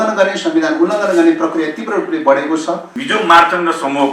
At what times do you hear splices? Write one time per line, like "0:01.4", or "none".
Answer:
0:02.9